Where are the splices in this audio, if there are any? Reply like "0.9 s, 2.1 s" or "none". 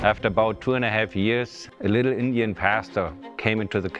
1.6 s